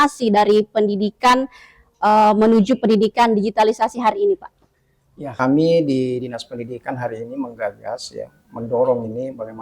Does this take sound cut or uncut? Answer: cut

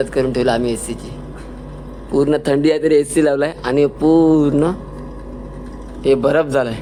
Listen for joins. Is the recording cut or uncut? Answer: uncut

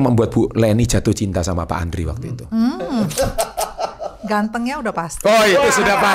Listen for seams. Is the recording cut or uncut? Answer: uncut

